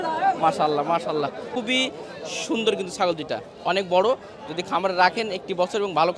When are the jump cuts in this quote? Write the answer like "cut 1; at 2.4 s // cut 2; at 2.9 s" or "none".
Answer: cut 1; at 1.5 s